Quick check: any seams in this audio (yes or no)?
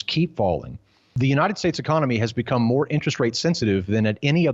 yes